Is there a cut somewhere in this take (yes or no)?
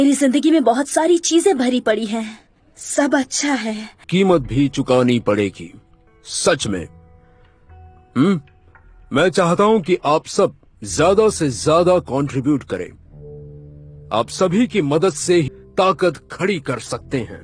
yes